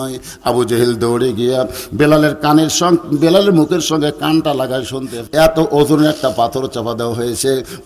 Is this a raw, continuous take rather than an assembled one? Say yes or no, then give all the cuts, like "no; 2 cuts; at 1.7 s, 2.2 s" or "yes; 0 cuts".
no; 1 cut; at 5.1 s